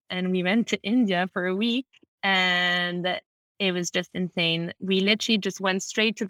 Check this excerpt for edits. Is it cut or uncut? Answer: uncut